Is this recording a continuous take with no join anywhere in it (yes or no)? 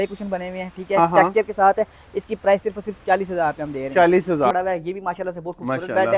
no